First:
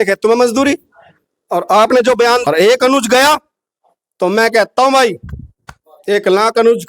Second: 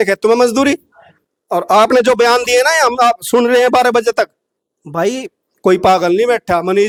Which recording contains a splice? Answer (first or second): first